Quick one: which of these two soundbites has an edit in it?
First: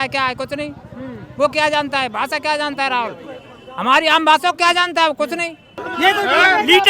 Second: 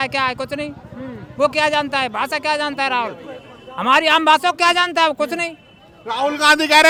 first; 1 cut; at 5.8 s

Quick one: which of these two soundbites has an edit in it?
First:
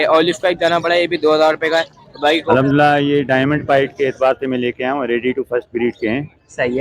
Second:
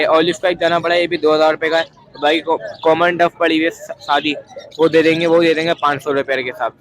first; 1 cut; at 2.5 s

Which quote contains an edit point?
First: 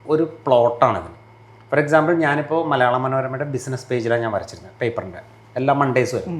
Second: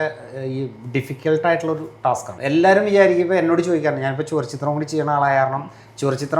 second; 1 cut; at 2.3 s

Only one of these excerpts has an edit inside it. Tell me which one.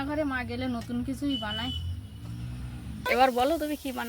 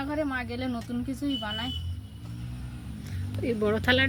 first; 1 cut; at 3.0 s

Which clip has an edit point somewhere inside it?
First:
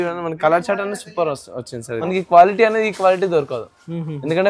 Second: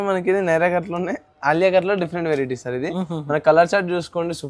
first; 1 cut; at 1.8 s

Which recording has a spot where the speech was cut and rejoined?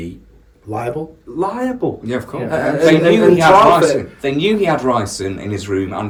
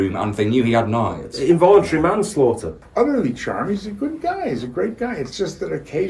second; 1 cut; at 2.8 s

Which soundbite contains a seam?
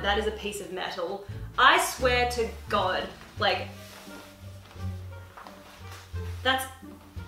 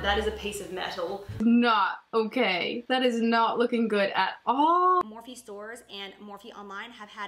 second; 2 cuts; at 1.4 s, 5.0 s

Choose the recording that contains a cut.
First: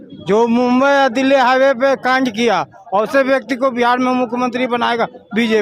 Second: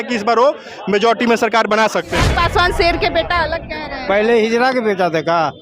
second; 1 cut; at 2.2 s

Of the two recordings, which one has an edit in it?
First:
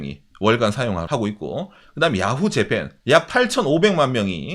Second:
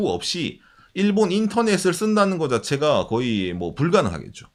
first; 2 cuts; at 1.0 s, 2.9 s

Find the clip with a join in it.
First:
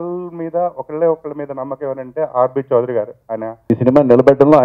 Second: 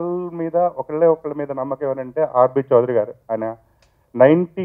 first; 1 cut; at 3.6 s

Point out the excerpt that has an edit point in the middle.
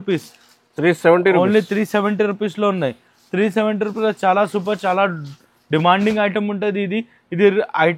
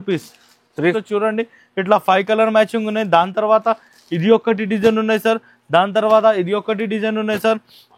second; 1 cut; at 1.0 s

